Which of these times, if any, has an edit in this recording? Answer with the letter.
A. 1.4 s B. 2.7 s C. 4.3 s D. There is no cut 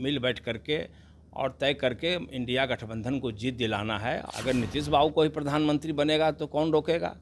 C